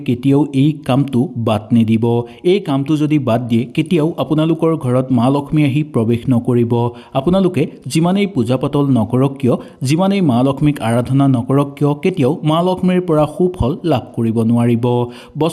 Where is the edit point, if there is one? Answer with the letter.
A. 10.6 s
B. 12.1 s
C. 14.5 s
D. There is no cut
D